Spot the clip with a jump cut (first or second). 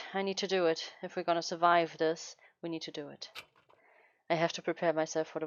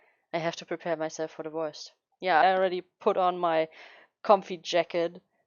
second